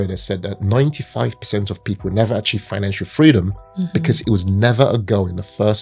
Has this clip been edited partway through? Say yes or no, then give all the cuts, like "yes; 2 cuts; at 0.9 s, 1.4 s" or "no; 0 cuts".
no; 0 cuts